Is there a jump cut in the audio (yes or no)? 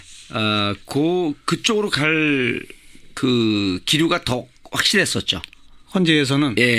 no